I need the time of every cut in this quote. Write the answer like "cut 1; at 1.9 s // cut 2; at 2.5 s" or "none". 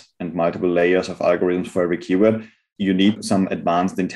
cut 1; at 3.2 s